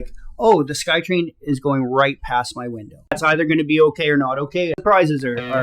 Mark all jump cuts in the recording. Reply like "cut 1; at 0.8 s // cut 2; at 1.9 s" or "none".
cut 1; at 3.2 s // cut 2; at 4.8 s